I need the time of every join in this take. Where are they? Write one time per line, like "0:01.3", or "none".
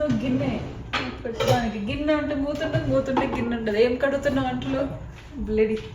none